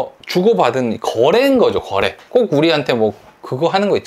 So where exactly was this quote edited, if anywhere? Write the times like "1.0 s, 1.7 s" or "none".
none